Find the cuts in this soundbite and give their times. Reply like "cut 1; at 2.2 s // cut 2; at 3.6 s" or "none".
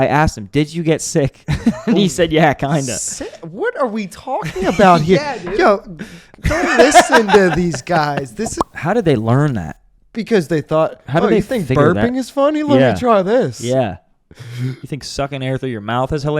cut 1; at 8.6 s

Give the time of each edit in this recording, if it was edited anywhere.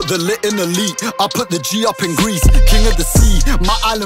none

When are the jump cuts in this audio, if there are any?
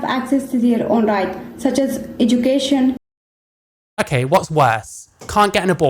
none

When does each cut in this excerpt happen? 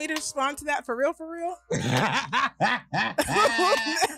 none

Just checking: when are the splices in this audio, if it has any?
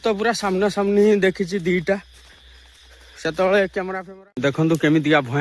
cut 1; at 4.0 s

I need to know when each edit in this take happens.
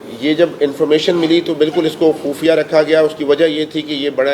none

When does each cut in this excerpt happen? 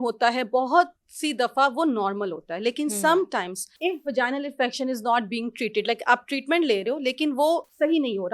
cut 1; at 3.6 s

